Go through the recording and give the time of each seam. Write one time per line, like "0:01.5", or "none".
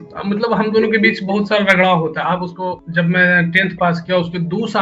0:02.8